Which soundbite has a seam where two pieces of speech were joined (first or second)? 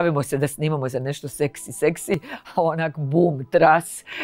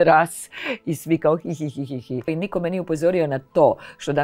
second